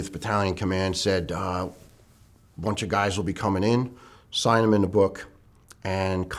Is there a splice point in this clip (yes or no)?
no